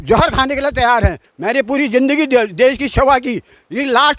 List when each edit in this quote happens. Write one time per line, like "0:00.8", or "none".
0:01.3